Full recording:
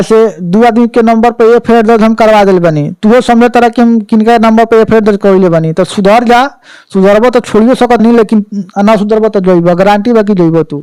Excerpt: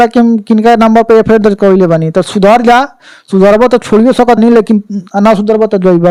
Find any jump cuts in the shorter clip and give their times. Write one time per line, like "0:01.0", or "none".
none